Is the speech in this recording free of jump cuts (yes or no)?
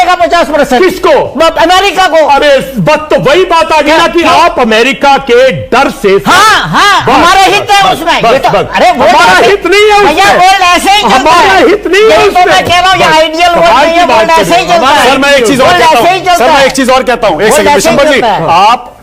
yes